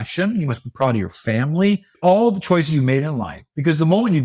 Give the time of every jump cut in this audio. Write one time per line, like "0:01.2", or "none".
none